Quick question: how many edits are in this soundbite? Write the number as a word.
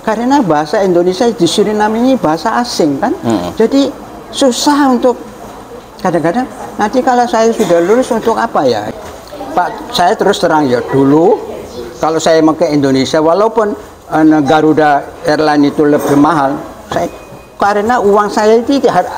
one